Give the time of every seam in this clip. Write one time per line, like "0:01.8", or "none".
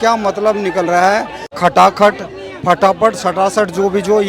0:01.5